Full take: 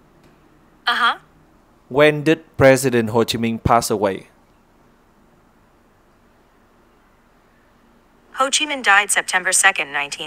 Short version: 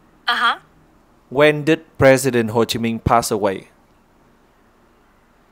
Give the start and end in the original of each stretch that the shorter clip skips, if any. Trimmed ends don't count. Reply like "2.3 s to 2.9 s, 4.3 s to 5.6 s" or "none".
5.0 s to 6.4 s